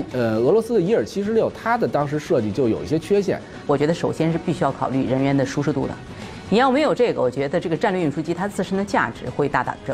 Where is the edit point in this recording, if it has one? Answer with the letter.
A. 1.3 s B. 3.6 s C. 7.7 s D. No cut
B